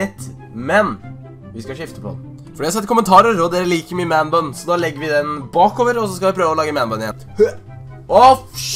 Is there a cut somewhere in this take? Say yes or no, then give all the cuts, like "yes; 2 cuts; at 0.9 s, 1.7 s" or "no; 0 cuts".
no; 0 cuts